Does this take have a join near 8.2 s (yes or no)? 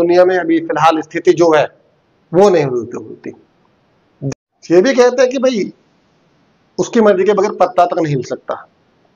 no